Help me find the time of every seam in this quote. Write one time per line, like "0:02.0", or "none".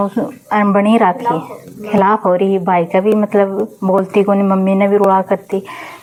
none

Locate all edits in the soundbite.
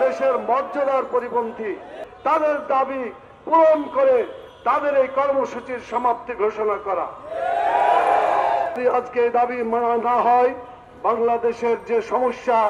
0:02.0
0:08.8

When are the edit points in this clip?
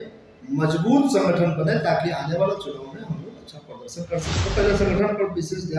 0:04.3

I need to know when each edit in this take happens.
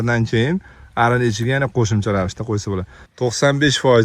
0:03.0

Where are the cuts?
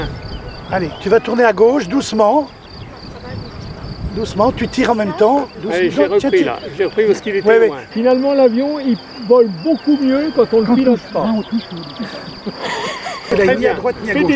0:07.8
0:13.3

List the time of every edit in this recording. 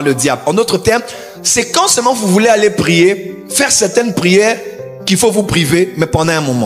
none

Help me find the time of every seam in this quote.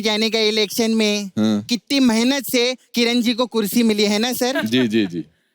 0:01.6

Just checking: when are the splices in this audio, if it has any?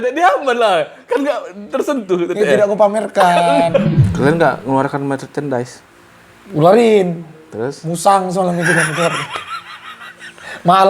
0:04.0

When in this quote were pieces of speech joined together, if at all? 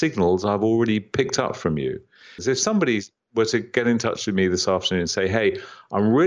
0:02.4

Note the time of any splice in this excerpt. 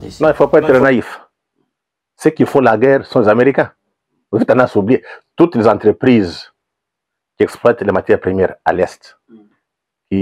none

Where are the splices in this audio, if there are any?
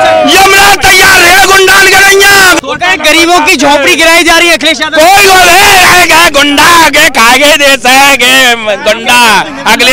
0:02.6

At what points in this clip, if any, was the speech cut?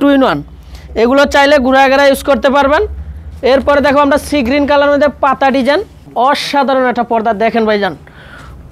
0:06.0

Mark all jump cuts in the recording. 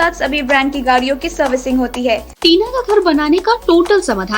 0:02.3

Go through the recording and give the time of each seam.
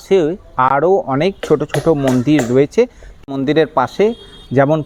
0:03.0

